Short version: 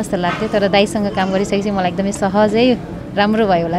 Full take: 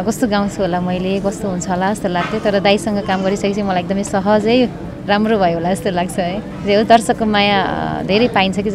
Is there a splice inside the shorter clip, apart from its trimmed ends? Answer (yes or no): no